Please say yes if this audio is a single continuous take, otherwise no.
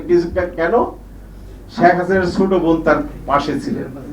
yes